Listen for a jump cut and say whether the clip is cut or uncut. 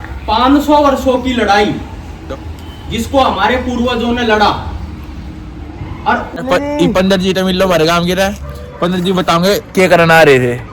cut